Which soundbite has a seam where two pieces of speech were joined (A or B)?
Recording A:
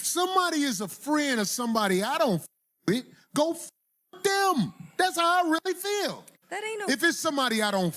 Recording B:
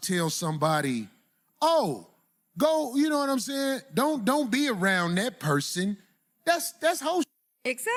A